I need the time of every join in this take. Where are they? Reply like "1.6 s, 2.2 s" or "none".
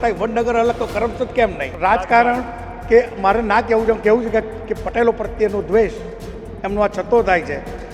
1.7 s